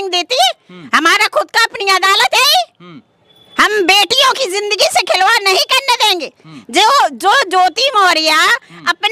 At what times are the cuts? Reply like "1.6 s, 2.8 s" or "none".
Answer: none